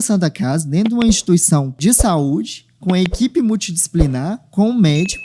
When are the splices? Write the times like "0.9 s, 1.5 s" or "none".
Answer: 1.8 s